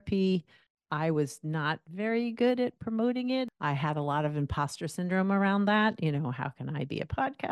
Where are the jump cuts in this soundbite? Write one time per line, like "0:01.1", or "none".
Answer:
0:03.5